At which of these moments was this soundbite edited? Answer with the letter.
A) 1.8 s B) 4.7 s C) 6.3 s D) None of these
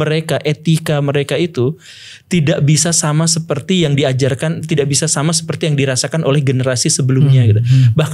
D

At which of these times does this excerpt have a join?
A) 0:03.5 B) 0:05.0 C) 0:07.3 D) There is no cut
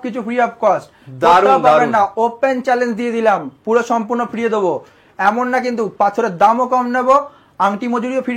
D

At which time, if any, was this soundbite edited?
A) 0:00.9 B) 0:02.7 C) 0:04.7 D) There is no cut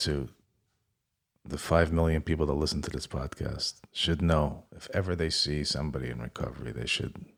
D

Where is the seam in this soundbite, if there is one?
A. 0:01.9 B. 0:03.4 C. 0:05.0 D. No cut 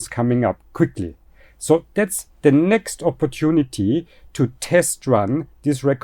D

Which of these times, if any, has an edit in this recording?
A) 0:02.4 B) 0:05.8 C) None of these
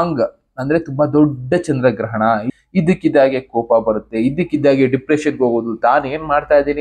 A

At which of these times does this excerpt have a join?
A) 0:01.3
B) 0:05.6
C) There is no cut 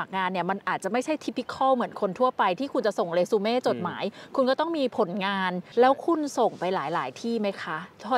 B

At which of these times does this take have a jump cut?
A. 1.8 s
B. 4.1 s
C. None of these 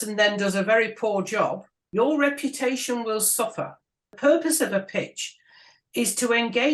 B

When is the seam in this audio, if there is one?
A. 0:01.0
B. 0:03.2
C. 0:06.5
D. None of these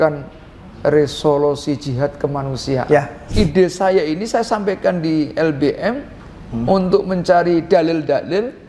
B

